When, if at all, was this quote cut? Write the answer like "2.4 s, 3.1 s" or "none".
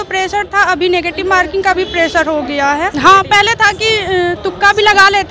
2.9 s